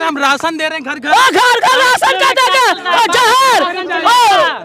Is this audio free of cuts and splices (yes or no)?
yes